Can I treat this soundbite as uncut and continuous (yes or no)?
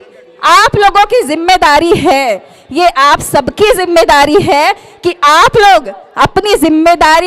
yes